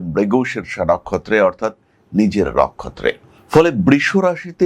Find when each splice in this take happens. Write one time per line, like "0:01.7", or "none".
none